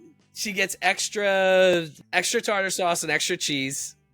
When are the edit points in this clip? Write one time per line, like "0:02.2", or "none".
0:01.9